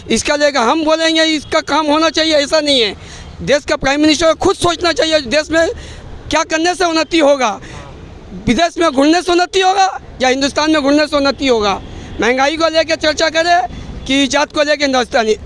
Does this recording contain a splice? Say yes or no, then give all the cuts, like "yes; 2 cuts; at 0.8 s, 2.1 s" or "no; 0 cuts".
no; 0 cuts